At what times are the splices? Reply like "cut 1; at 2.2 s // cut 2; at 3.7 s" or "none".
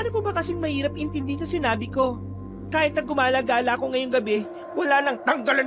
none